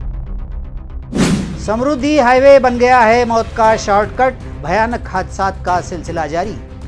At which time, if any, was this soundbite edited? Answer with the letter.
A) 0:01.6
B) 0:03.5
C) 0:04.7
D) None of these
D